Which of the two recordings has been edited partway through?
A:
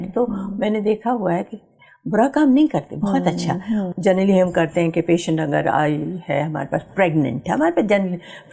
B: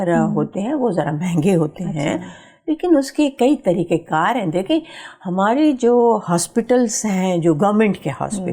A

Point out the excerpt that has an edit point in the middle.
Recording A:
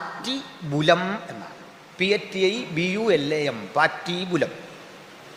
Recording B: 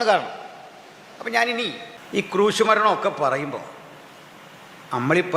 B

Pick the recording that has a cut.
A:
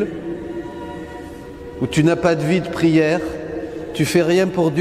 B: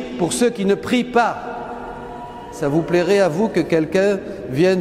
B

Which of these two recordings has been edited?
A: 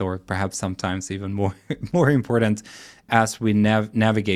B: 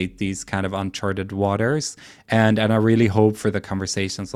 A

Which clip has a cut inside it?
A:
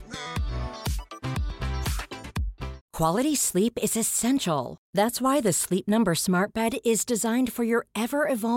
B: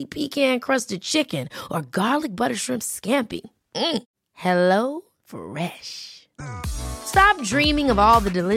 A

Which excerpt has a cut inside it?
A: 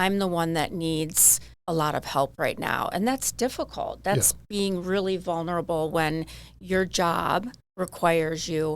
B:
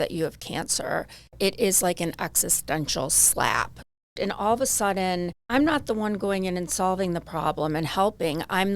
B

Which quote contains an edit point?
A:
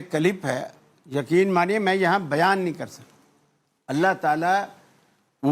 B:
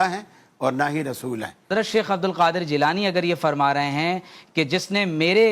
B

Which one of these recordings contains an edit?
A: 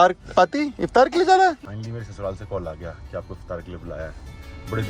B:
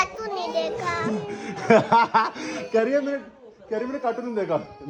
A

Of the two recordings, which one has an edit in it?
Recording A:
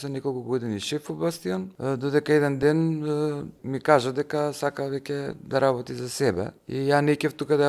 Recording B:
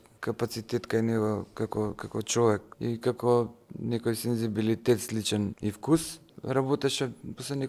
A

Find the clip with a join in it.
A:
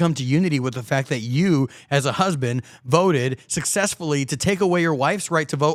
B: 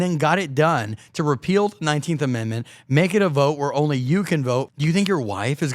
B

